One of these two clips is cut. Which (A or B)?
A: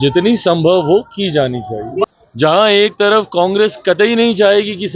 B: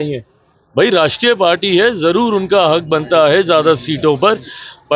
A